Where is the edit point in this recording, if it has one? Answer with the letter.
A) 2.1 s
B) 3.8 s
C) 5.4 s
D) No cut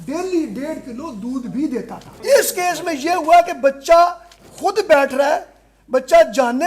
A